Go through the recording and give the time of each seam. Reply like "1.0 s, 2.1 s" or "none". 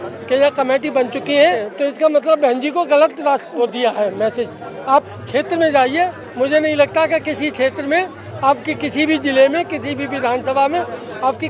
1.7 s, 3.5 s, 4.7 s